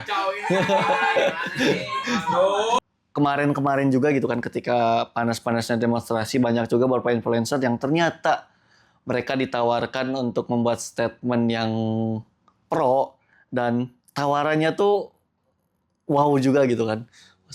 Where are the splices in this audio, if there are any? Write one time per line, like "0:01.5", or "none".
0:02.8